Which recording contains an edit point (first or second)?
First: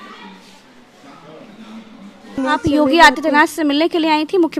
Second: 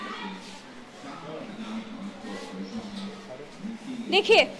first